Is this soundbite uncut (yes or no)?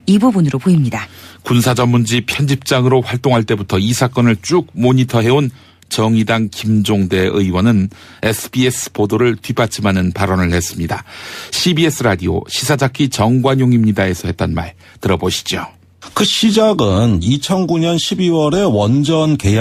yes